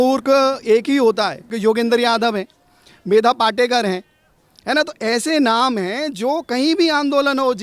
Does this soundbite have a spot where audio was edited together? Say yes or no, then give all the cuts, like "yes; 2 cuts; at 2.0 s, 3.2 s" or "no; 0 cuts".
yes; 1 cut; at 1.5 s